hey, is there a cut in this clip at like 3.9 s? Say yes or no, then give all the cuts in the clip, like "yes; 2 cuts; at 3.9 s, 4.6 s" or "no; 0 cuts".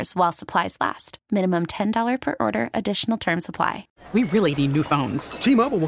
yes; 1 cut; at 3.9 s